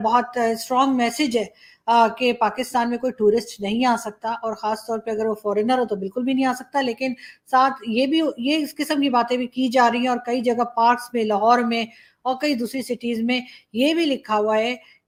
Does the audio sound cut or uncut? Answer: uncut